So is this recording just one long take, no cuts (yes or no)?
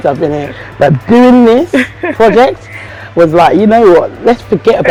yes